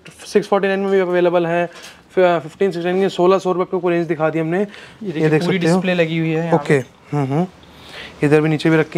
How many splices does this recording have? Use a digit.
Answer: 0